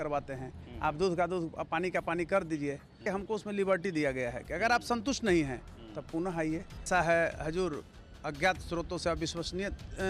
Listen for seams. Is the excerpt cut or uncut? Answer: cut